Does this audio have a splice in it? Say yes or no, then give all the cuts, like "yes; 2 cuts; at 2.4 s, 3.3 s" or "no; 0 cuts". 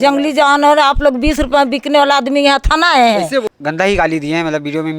yes; 1 cut; at 3.5 s